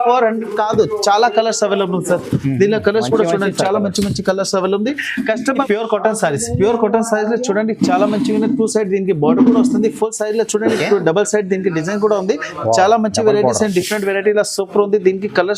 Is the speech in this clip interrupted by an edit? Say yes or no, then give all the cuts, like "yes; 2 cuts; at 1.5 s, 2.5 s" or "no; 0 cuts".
yes; 1 cut; at 5.6 s